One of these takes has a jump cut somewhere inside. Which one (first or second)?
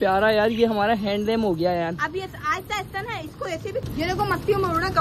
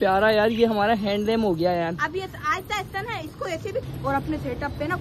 second